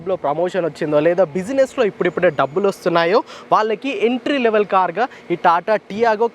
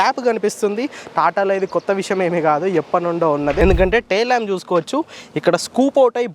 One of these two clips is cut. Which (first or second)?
second